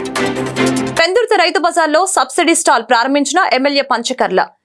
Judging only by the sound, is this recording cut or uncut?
cut